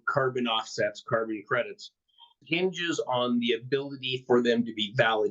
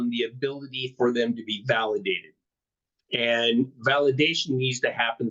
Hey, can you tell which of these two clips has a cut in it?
first; 1 cut; at 2.4 s

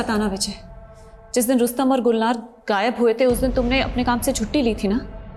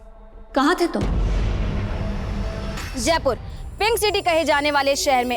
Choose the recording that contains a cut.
second; 1 cut; at 2.8 s

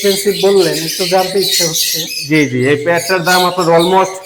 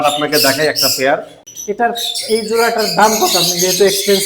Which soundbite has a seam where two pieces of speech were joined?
second; 1 cut; at 1.4 s

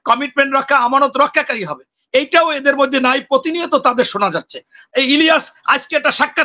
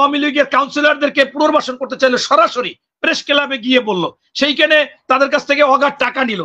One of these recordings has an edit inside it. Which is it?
first; 1 cut; at 4.8 s

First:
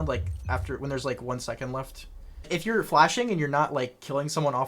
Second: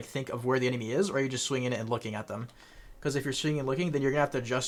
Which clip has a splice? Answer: first; 1 cut; at 2.5 s

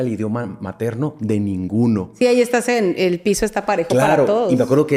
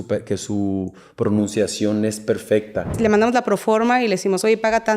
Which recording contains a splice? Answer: second; 1 cut; at 3.0 s

